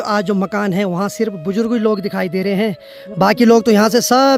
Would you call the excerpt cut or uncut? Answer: uncut